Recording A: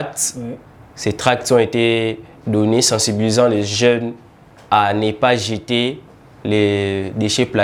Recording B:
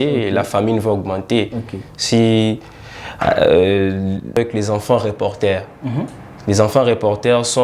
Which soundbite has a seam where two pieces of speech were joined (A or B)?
B